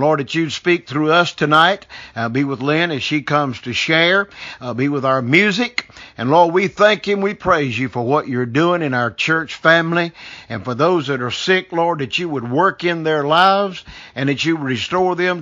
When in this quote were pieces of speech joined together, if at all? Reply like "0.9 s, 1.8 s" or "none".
none